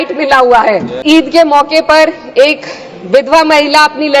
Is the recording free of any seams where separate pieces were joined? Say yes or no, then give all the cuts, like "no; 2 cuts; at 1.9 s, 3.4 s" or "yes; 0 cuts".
no; 1 cut; at 1.0 s